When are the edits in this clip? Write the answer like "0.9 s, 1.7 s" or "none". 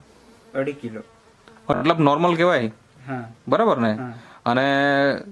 1.8 s